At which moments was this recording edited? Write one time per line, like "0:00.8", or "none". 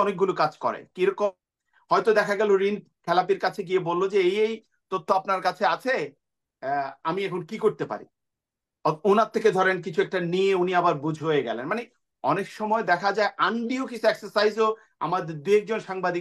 none